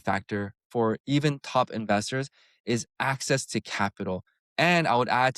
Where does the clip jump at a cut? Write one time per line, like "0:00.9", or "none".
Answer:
none